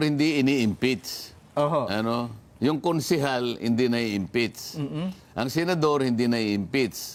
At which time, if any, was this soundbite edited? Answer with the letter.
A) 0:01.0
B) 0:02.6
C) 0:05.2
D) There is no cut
D